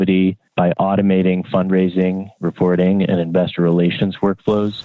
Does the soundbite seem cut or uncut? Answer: uncut